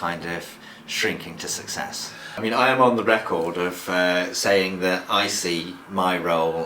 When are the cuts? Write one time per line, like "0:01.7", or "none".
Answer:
0:02.4